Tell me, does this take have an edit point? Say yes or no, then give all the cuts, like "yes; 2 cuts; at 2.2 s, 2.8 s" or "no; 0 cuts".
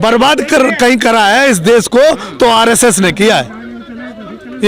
no; 0 cuts